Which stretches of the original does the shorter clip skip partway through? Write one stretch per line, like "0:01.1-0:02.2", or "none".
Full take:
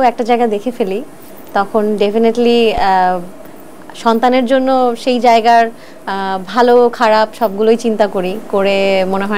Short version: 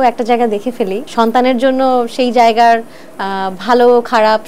0:01.0-0:03.9